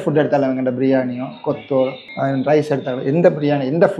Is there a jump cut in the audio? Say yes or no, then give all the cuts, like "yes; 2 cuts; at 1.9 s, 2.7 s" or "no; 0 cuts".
no; 0 cuts